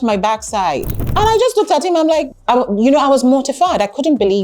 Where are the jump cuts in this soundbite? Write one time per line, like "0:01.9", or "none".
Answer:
0:01.0
0:02.3